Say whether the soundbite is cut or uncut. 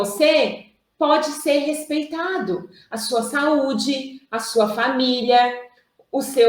uncut